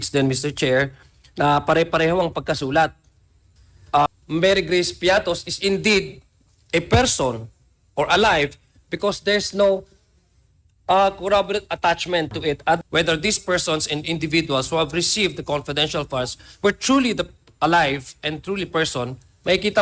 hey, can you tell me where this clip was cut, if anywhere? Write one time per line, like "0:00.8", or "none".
0:04.1
0:12.8